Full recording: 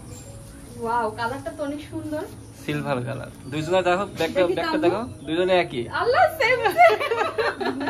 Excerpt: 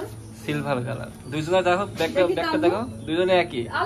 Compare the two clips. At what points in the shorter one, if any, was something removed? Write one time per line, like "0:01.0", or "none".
none